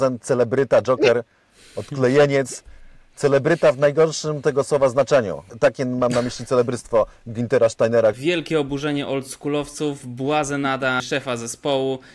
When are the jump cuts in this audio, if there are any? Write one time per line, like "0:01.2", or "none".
0:05.4
0:08.2
0:11.0